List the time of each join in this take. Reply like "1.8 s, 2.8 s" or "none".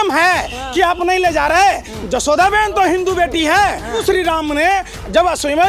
4.0 s